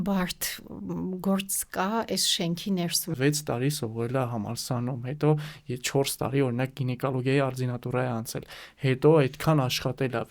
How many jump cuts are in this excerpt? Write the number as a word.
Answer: one